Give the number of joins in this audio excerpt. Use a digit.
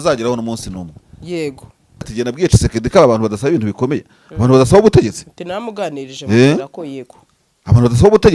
1